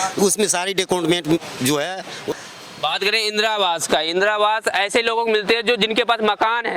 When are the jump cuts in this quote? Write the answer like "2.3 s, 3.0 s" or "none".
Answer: 2.3 s